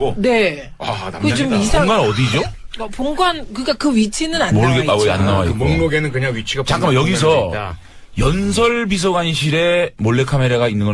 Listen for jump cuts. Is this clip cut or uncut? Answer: cut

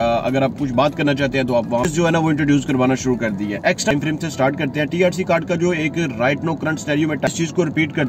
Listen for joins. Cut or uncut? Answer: cut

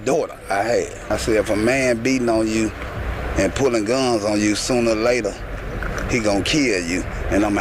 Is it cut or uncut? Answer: cut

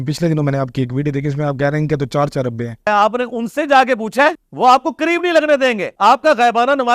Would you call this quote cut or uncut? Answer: cut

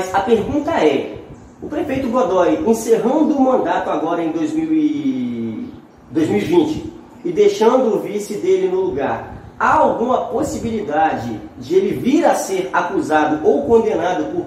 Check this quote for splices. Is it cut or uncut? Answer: uncut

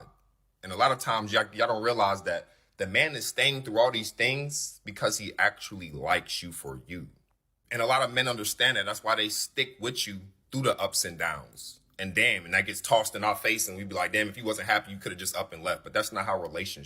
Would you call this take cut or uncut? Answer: cut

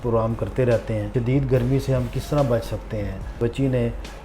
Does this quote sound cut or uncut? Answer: cut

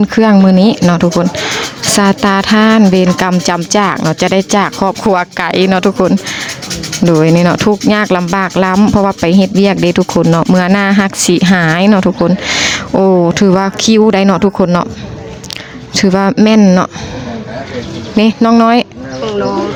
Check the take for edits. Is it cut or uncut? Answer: uncut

